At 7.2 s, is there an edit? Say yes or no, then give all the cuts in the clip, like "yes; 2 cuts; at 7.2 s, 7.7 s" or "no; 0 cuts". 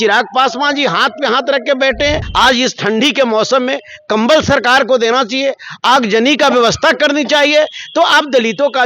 no; 1 cut; at 2.3 s